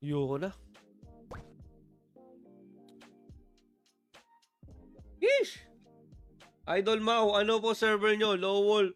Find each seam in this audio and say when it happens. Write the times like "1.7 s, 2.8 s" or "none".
none